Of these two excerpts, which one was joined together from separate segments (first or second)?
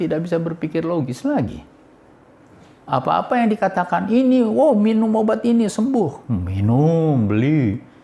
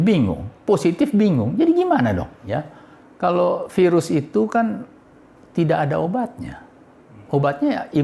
second